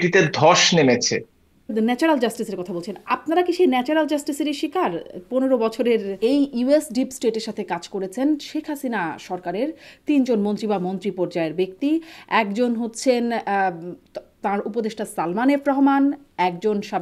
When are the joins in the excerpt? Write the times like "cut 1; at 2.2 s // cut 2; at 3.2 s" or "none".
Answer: cut 1; at 1.7 s // cut 2; at 6.1 s